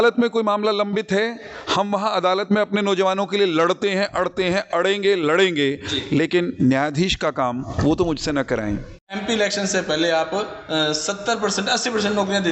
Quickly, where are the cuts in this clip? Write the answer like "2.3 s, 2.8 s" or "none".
9.4 s